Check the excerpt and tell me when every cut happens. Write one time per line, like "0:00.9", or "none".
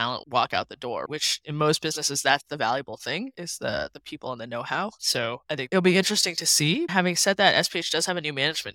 0:01.4
0:06.9